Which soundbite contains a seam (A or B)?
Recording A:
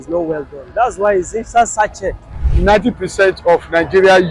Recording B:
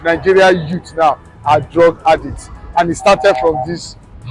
A